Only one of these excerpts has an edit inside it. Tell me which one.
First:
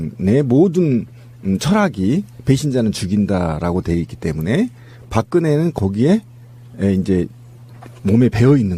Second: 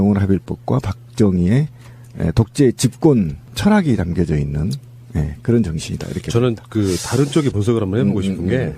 second; 1 cut; at 2.4 s

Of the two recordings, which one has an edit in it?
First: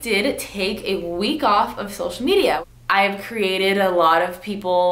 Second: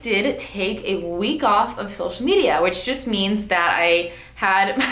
first; 1 cut; at 2.6 s

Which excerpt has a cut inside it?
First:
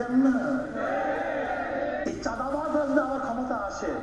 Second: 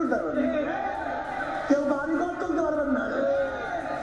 first; 1 cut; at 2.0 s

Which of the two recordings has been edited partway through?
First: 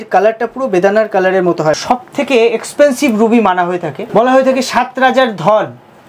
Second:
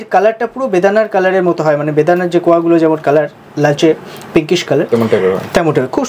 first; 2 cuts; at 1.8 s, 3.9 s

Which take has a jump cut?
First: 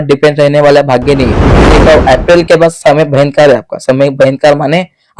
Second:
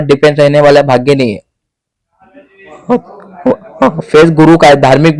first; 1 cut; at 1.7 s

